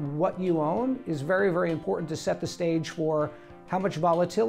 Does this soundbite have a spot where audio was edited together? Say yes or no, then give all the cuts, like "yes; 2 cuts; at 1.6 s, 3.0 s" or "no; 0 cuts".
no; 0 cuts